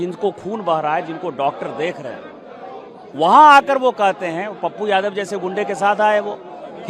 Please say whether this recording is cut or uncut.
uncut